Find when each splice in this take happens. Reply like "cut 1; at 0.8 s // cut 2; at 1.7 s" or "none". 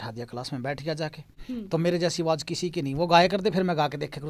cut 1; at 1.4 s